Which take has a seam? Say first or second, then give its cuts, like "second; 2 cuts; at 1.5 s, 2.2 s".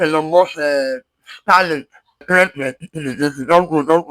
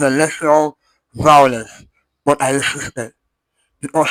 first; 1 cut; at 2.2 s